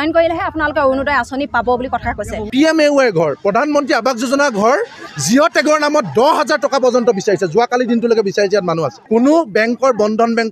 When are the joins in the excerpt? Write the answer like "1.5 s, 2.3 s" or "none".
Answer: 2.5 s, 9.0 s